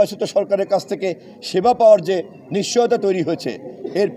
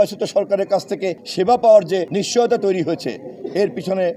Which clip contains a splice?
second; 2 cuts; at 1.2 s, 2.1 s

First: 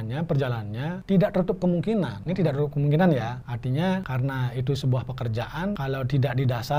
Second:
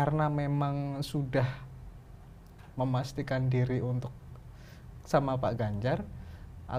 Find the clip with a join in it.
first; 5 cuts; at 1.0 s, 2.2 s, 3.5 s, 4.1 s, 5.8 s

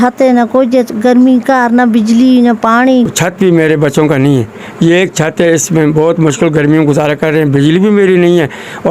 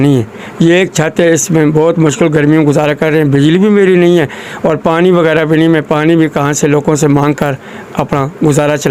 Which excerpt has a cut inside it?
first; 1 cut; at 3.2 s

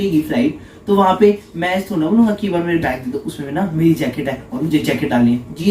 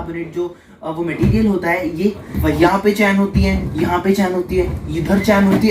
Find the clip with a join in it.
second; 1 cut; at 2.5 s

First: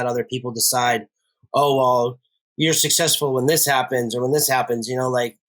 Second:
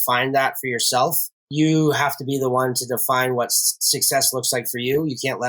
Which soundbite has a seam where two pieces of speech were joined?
second; 1 cut; at 1.4 s

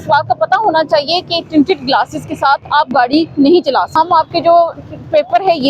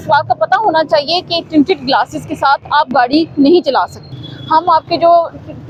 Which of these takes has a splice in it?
first; 1 cut; at 3.9 s

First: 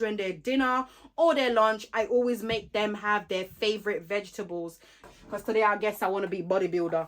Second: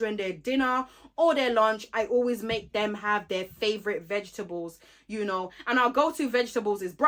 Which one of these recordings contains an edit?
first; 1 cut; at 5.0 s

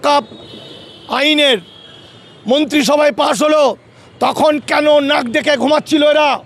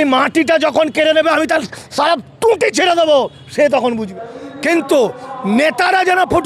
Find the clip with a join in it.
second; 1 cut; at 4.1 s

